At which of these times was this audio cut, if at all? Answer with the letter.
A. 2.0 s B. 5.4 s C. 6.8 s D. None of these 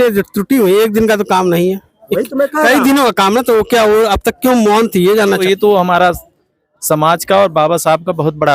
B